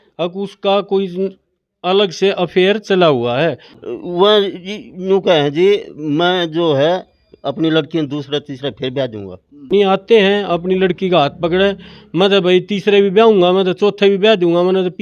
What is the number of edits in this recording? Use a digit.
2